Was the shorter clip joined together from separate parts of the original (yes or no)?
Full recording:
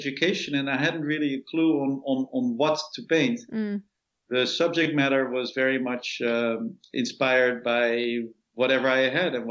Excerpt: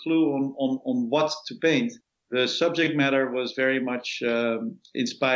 yes